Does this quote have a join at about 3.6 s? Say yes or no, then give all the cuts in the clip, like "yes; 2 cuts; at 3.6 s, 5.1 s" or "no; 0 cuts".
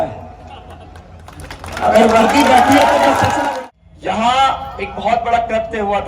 yes; 1 cut; at 3.6 s